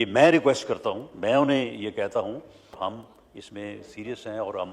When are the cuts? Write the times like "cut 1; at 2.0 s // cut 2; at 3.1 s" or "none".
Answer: cut 1; at 2.7 s